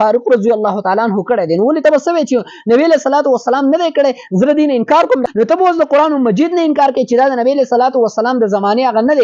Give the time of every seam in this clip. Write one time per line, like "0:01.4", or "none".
0:05.2